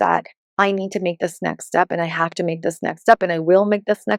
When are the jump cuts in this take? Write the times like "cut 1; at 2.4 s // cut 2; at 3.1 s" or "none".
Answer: none